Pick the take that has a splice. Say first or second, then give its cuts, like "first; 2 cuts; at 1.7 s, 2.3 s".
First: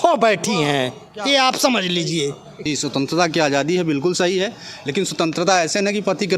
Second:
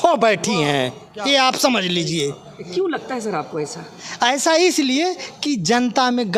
first; 1 cut; at 2.6 s